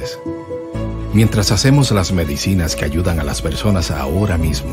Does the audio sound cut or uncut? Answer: uncut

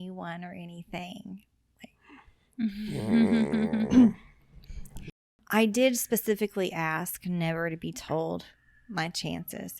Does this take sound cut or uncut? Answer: cut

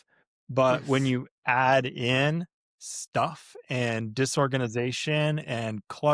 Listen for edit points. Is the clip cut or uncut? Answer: uncut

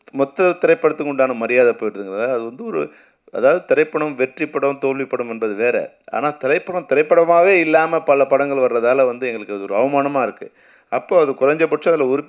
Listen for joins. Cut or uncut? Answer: uncut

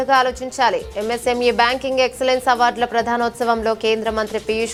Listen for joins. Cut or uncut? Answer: uncut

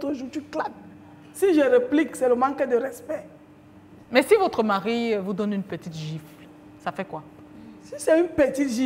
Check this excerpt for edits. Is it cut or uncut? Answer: uncut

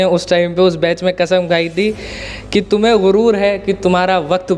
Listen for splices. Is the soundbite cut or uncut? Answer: uncut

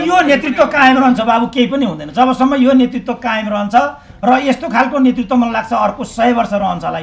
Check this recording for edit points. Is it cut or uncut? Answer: uncut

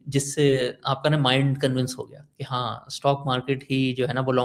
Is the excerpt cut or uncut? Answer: uncut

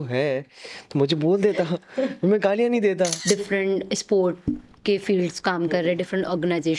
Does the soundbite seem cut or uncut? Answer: cut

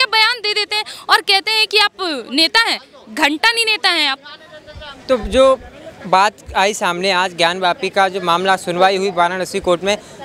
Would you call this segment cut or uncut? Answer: uncut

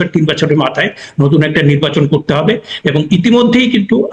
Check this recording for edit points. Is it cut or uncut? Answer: uncut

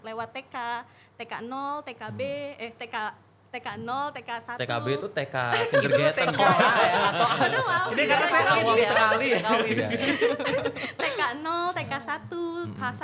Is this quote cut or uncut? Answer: uncut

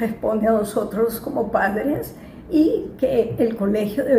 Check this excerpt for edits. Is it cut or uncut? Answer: uncut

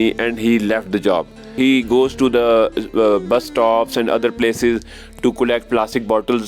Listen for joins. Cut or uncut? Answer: cut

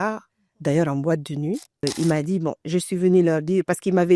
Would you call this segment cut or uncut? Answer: cut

